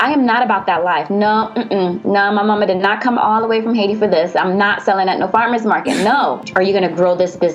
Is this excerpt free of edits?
no; 1 cut; at 6.4 s

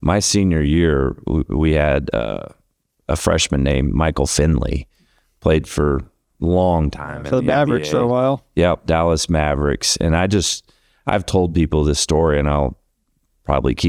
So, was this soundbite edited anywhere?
no; 0 cuts

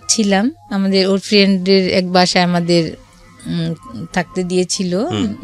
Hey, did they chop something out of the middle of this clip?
no; 0 cuts

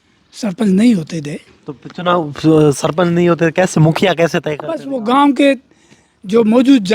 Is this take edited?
no; 0 cuts

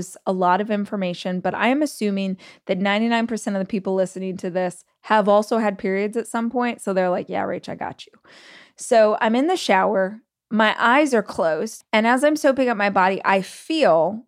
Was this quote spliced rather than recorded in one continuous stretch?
yes; 2 cuts; at 10.2 s, 11.8 s

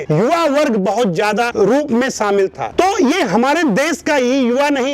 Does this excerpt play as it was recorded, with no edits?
yes; 0 cuts

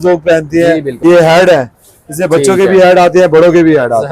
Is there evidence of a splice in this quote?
yes; 1 cut; at 1.0 s

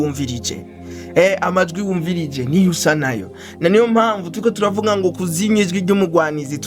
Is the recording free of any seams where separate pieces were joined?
yes; 0 cuts

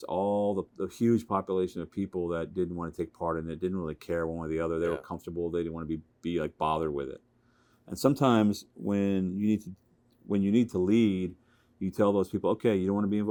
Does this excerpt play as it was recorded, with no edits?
yes; 0 cuts

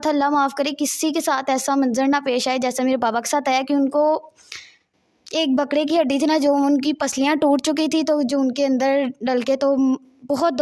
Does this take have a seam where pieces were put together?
no; 0 cuts

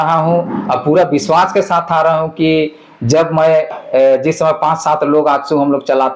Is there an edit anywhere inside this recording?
no; 0 cuts

